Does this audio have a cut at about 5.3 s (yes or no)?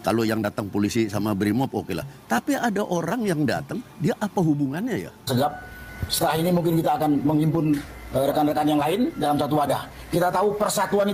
yes